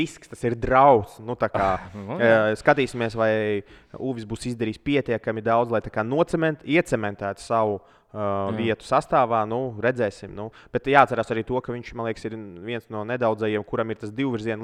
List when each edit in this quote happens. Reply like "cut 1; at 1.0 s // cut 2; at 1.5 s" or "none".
none